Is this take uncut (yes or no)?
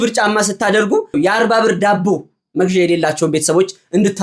no